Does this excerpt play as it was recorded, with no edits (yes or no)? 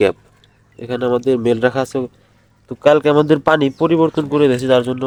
yes